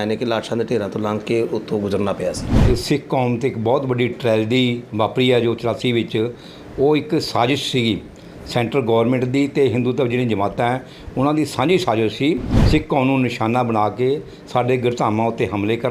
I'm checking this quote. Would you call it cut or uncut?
cut